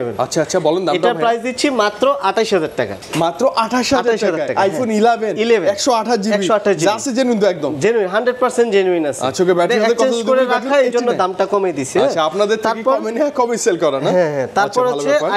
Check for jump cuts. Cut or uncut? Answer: uncut